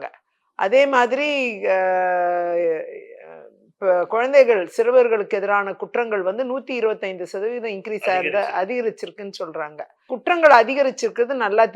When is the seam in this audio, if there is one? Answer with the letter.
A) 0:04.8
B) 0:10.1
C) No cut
B